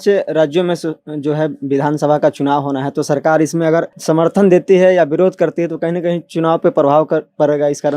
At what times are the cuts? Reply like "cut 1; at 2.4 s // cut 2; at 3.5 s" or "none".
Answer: cut 1; at 3.9 s